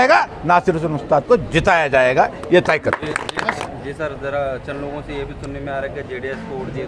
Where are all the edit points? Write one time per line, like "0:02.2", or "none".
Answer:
0:03.6